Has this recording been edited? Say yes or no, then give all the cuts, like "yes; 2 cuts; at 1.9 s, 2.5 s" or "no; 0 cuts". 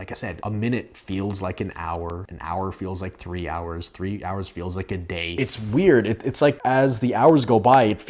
yes; 3 cuts; at 2.3 s, 5.3 s, 6.6 s